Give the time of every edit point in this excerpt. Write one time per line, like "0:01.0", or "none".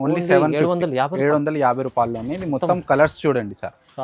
none